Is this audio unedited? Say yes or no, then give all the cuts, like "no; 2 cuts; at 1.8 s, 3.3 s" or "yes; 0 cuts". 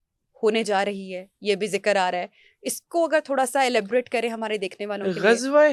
yes; 0 cuts